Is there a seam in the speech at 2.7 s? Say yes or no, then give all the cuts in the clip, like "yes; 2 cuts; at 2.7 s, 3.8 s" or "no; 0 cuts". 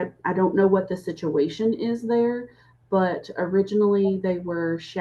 yes; 1 cut; at 2.7 s